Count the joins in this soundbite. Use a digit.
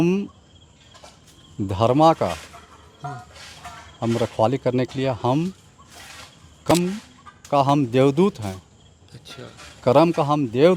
1